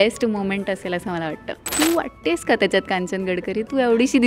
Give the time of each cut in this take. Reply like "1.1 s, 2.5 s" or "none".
1.7 s

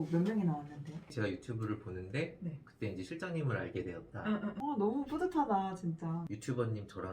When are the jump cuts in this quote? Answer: 1.1 s, 4.5 s, 6.3 s

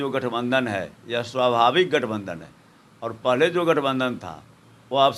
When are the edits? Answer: none

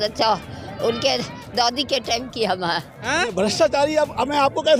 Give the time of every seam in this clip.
3.3 s

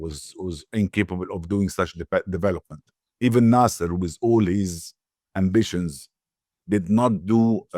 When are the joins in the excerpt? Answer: none

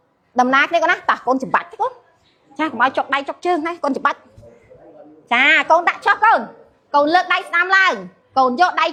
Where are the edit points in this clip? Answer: none

